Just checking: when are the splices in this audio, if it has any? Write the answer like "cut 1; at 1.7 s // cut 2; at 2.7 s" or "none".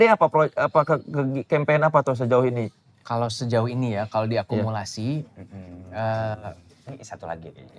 none